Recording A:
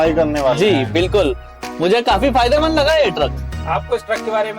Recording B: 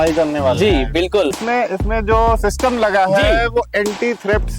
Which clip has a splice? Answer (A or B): B